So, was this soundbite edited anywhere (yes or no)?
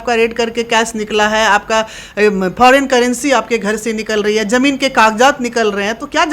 no